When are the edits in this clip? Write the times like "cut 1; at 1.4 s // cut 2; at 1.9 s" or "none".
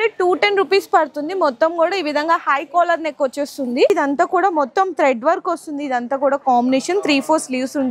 cut 1; at 3.9 s